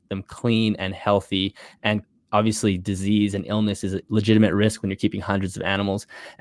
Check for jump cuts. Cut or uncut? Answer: cut